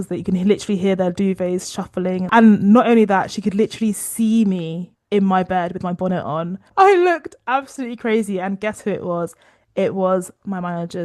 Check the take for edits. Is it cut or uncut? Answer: cut